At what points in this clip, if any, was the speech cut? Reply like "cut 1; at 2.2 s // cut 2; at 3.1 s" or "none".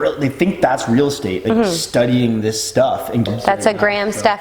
cut 1; at 3.3 s